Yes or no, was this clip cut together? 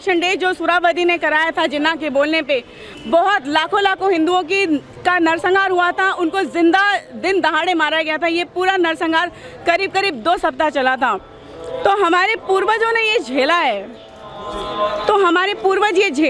no